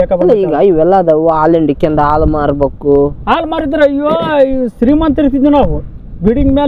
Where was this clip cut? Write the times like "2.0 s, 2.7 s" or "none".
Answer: none

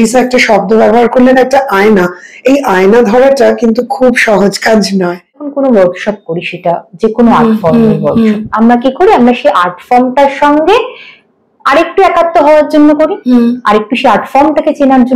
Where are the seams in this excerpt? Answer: 5.5 s

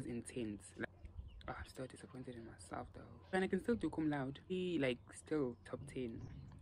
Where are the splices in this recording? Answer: 0.8 s, 3.3 s, 4.5 s

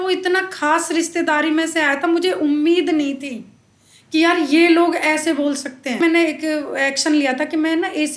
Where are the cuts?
6.0 s

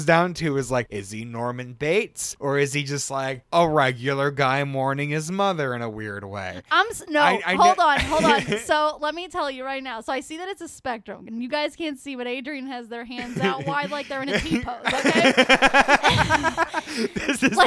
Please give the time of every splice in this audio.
1.0 s, 2.2 s

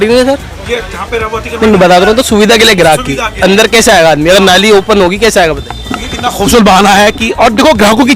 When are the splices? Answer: none

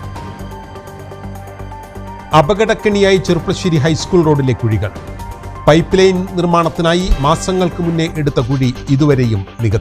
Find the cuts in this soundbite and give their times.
1.4 s

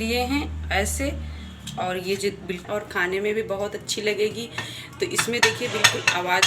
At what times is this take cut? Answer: 2.6 s

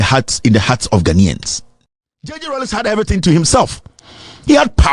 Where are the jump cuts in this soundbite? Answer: 2.4 s

